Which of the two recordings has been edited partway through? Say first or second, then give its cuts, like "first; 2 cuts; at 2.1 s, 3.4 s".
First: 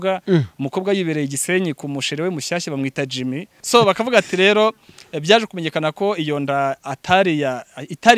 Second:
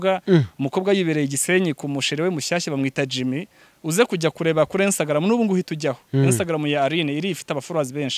first; 1 cut; at 3.5 s